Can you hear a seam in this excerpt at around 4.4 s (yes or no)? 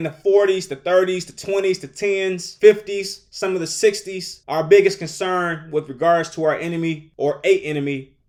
no